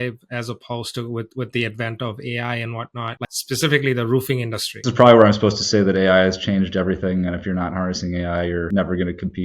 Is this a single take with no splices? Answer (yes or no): no